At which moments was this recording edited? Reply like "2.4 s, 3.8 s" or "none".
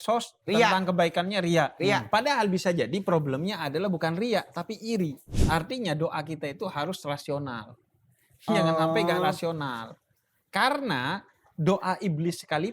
5.3 s